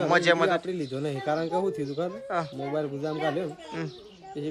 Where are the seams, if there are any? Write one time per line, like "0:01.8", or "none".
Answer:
none

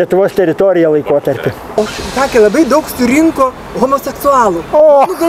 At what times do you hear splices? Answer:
0:01.6

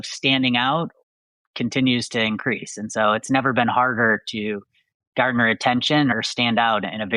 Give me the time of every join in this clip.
0:03.2
0:06.1

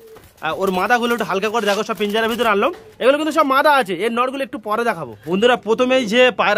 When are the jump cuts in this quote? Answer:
0:05.1

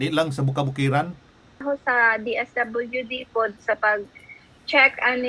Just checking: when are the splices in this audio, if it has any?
0:01.6

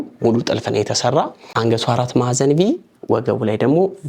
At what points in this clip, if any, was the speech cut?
0:01.5

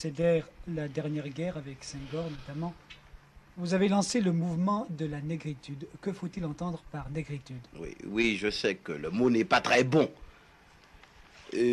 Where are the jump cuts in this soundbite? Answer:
none

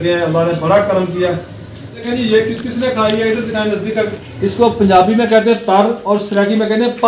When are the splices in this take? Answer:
0:01.5
0:04.2

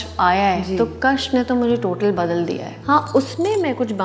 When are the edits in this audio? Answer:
0:02.7

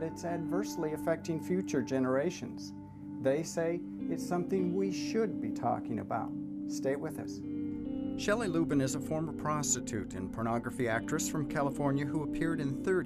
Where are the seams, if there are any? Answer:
0:02.6

